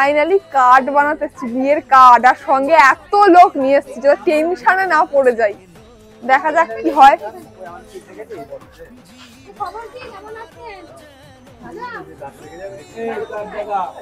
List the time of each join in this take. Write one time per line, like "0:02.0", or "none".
none